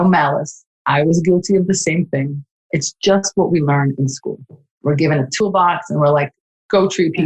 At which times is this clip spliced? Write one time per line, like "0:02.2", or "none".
0:05.3